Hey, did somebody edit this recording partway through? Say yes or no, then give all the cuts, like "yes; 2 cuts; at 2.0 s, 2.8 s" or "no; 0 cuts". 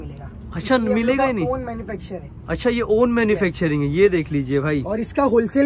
no; 0 cuts